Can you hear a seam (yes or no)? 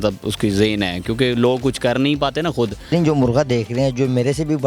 yes